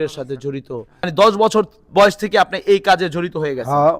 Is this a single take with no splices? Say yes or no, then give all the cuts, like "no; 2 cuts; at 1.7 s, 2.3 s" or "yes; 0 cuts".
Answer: no; 1 cut; at 1.1 s